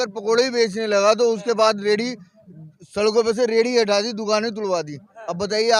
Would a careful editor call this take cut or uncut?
uncut